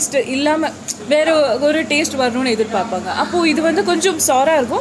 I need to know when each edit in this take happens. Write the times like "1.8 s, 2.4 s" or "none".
none